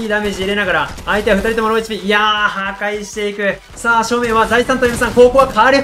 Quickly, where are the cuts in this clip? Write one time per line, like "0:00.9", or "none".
0:03.7